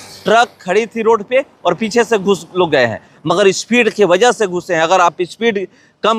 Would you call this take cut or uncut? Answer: uncut